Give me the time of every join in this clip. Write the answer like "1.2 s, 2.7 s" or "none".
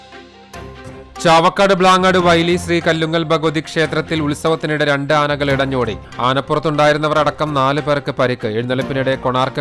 0.9 s